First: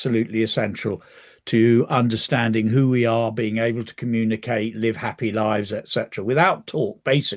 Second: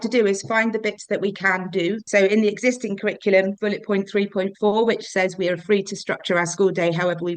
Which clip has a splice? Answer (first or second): second